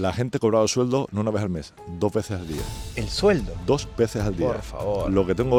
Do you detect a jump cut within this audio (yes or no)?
no